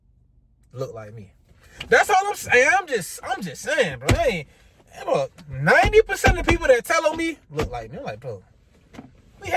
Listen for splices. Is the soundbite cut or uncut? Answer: uncut